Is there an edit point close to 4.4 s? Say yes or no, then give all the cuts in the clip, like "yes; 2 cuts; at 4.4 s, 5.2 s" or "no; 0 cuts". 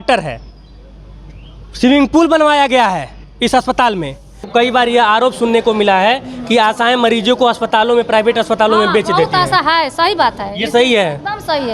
yes; 1 cut; at 4.4 s